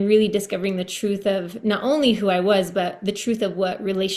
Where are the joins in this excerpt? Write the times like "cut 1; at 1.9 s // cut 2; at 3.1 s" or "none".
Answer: none

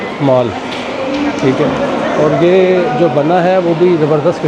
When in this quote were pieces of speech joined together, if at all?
none

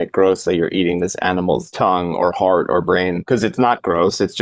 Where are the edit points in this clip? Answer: cut 1; at 1.7 s // cut 2; at 3.2 s

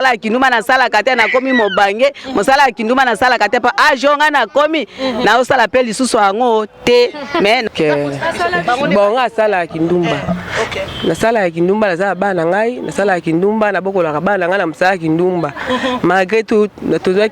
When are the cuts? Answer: cut 1; at 7.7 s

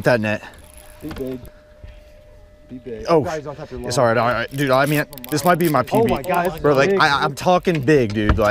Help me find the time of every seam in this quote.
cut 1; at 1.5 s

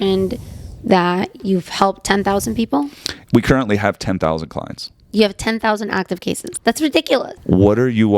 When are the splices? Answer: cut 1; at 1.4 s // cut 2; at 6.5 s // cut 3; at 7.3 s

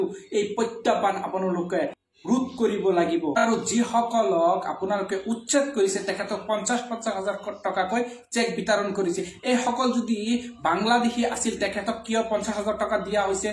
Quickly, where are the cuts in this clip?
cut 1; at 2.1 s // cut 2; at 3.3 s

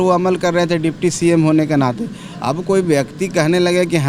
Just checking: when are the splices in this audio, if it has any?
none

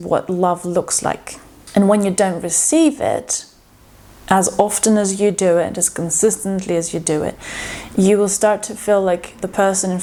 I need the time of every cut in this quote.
none

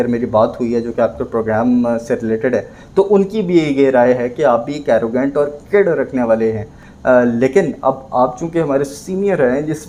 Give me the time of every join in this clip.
none

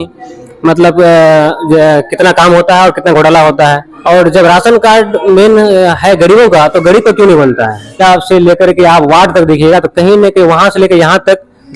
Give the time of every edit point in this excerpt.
cut 1; at 3.9 s // cut 2; at 8.0 s

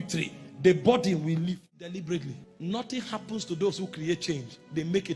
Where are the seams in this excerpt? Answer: cut 1; at 1.8 s

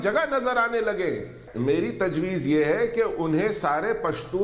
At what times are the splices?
cut 1; at 1.4 s

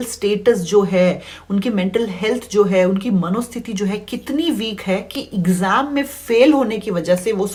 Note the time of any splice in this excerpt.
none

